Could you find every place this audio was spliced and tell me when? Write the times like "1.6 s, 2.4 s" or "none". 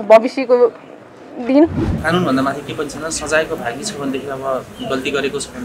1.9 s